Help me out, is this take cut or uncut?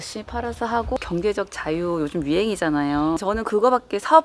cut